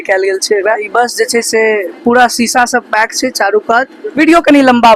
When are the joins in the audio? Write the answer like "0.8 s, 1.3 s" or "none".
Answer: 0.8 s, 4.0 s